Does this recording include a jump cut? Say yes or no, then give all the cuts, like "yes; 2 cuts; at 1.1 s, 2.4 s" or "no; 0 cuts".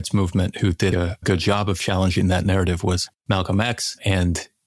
yes; 1 cut; at 0.9 s